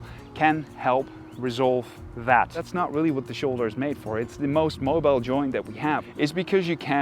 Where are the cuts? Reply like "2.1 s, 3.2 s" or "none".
2.7 s, 6.1 s